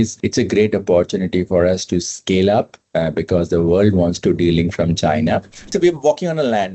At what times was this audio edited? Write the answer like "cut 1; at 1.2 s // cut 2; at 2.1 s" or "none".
cut 1; at 5.7 s